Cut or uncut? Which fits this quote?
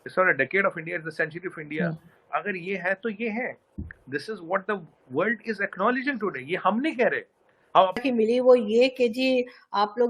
cut